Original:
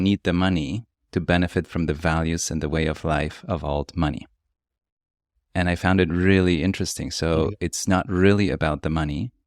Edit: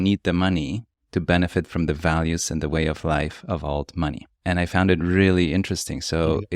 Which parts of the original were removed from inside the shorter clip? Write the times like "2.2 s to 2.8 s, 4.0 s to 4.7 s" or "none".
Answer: 4.3 s to 5.4 s